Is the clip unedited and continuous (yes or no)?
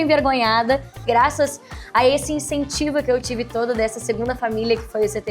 no